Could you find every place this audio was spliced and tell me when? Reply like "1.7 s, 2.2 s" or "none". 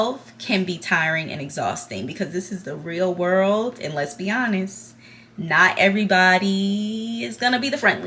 none